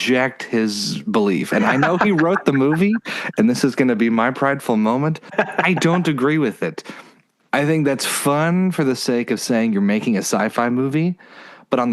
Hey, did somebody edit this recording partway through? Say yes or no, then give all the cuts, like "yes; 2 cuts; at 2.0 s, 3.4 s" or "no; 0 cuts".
yes; 1 cut; at 5.2 s